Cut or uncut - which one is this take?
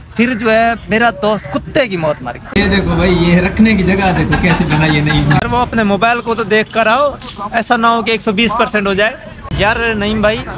cut